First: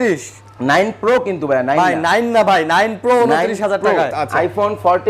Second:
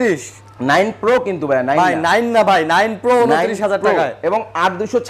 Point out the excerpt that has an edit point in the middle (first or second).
first